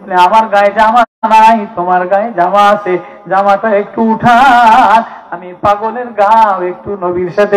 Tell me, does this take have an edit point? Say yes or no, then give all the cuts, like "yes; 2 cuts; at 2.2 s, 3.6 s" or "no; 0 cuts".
no; 0 cuts